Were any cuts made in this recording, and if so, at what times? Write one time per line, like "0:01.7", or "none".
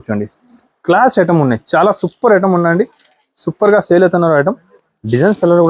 none